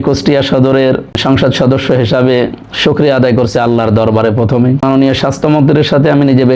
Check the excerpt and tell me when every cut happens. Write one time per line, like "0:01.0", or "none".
0:01.2
0:04.8